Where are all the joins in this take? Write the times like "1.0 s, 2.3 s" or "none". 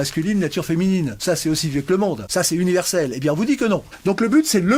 1.1 s, 2.2 s, 3.9 s